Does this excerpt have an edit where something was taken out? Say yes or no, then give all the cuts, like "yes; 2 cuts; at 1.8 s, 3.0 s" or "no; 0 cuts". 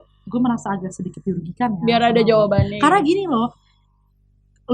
no; 0 cuts